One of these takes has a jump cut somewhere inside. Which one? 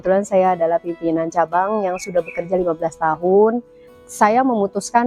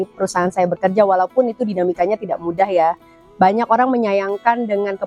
first; 1 cut; at 3.8 s

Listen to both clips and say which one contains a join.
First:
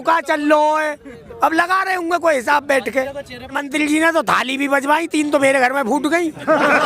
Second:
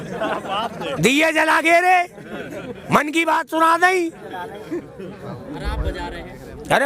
first; 1 cut; at 3.5 s

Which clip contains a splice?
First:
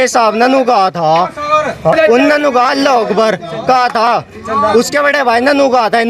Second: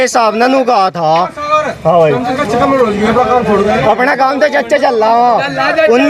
first; 1 cut; at 1.9 s

